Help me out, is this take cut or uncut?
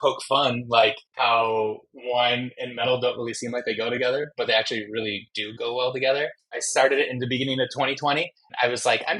cut